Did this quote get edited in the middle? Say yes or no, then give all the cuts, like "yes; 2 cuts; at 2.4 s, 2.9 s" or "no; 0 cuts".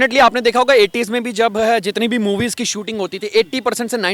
no; 0 cuts